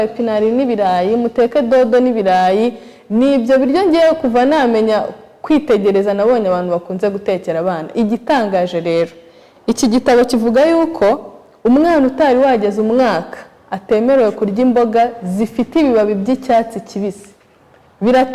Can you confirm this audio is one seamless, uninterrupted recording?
yes; 0 cuts

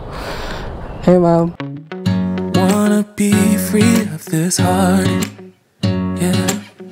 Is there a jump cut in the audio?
no; 0 cuts

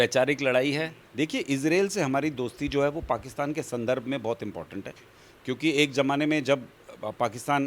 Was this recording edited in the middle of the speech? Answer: yes; 1 cut; at 1.0 s

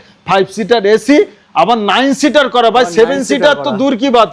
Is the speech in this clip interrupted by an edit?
no; 0 cuts

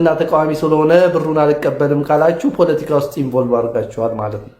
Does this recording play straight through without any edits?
yes; 0 cuts

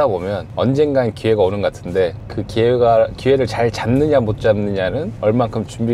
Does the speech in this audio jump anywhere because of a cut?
no; 0 cuts

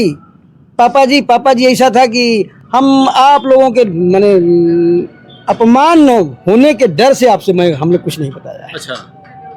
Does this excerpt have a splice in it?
no; 0 cuts

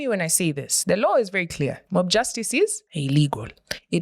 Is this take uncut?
no; 2 cuts; at 1.8 s, 2.9 s

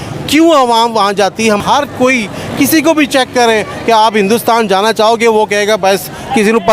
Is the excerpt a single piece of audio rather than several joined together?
no; 1 cut; at 1.6 s

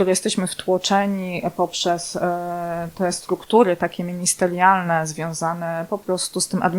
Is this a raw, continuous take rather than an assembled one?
yes; 0 cuts

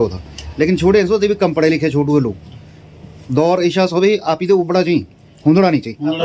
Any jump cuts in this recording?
no; 0 cuts

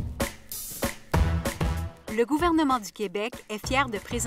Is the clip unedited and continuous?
no; 1 cut; at 1.9 s

